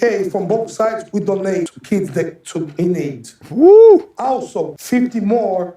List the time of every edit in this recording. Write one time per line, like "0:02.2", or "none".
0:01.8
0:04.8